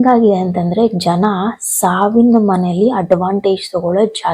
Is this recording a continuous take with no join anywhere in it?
yes; 0 cuts

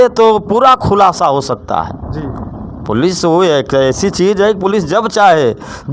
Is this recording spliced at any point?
no; 0 cuts

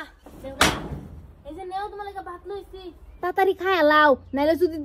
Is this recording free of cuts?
no; 1 cut; at 3.2 s

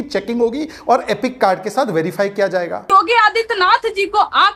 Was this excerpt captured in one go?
no; 1 cut; at 2.9 s

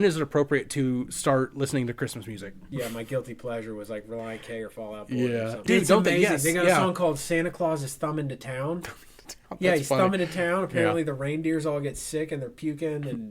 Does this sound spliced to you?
yes; 2 cuts; at 2.6 s, 5.6 s

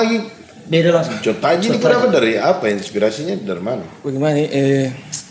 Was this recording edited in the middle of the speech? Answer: no; 0 cuts

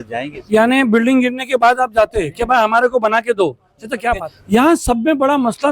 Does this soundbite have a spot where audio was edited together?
yes; 1 cut; at 4.3 s

